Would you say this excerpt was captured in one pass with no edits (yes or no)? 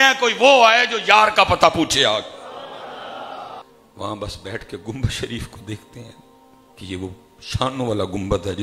no